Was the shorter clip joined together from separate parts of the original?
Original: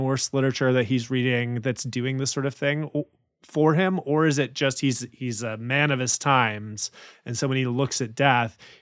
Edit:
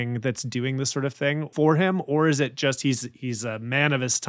yes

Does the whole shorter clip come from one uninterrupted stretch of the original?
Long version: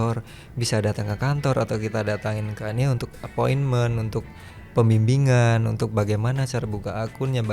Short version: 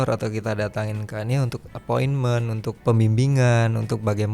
no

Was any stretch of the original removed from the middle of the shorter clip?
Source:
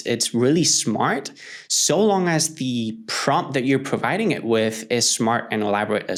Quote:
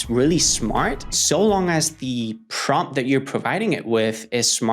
yes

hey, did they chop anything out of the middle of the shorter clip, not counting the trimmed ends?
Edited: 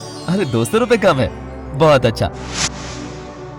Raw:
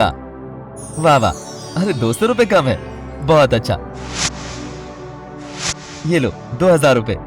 yes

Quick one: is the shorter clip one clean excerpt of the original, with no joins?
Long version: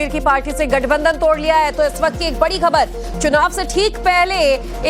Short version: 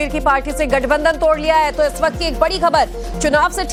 yes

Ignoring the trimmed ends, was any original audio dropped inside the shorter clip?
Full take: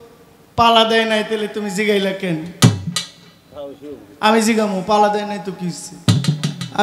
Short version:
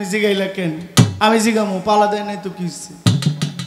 yes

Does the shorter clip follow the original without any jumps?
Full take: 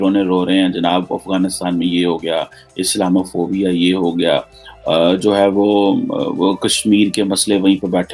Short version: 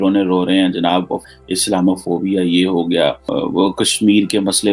no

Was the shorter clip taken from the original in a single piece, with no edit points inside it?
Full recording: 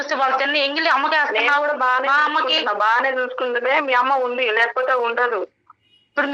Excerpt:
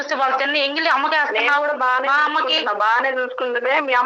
yes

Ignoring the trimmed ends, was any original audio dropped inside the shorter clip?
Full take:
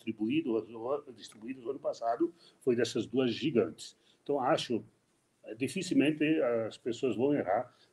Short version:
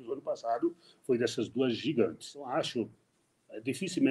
yes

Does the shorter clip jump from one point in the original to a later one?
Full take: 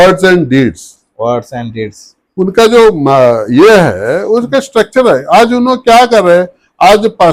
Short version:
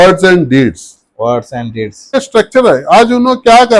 yes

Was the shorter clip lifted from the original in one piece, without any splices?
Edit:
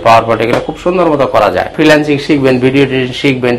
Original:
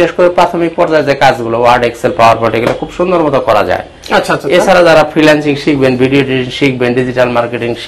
no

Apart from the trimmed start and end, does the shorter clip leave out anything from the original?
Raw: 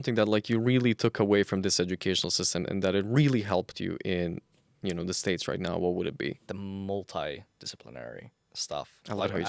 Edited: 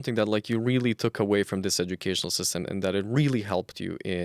no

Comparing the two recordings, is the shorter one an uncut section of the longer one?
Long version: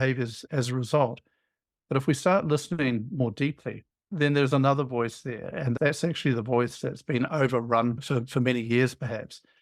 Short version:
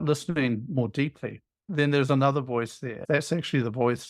no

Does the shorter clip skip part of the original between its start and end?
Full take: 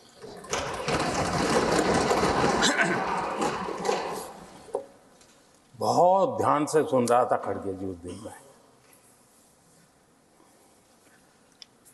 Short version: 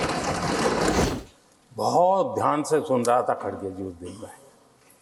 yes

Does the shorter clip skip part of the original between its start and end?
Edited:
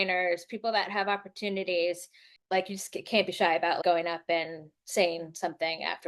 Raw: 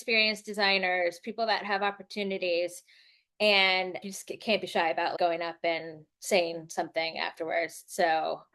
yes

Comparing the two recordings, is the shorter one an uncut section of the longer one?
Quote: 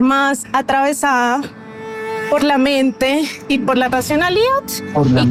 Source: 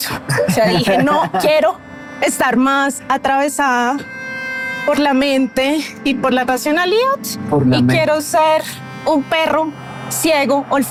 yes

